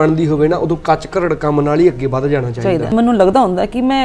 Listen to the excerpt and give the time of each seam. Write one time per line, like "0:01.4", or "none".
0:02.9